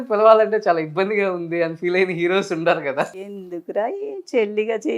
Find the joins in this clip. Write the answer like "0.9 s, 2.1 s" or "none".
3.1 s